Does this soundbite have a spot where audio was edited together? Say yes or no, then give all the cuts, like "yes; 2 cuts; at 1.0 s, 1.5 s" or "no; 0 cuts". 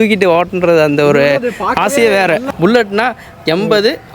yes; 1 cut; at 2.5 s